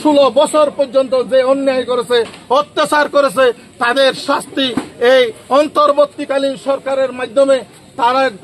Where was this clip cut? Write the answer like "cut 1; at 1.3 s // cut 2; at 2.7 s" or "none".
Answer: none